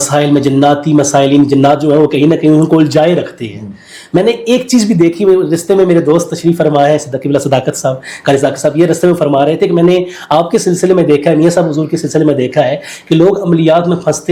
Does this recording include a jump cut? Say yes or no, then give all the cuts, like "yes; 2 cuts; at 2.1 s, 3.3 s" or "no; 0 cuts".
no; 0 cuts